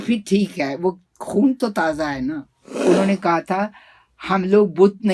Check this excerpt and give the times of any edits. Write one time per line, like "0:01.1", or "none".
0:02.8